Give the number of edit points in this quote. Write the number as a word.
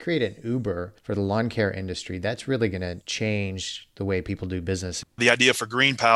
three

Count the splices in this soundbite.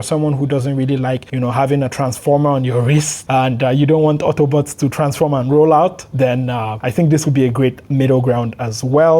three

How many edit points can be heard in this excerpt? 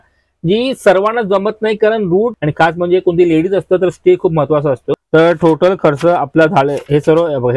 two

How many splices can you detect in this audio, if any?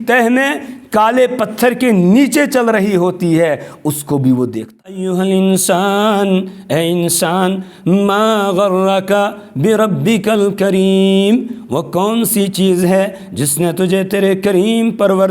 one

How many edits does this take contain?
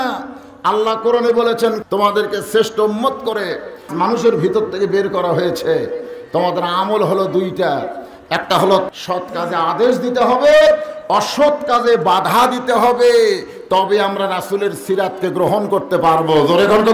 three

